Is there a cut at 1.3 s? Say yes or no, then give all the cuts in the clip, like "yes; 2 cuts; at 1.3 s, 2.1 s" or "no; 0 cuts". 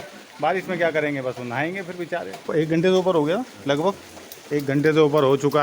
no; 1 cut; at 2.5 s